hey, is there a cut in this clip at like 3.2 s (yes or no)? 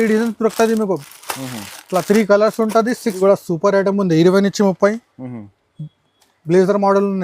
yes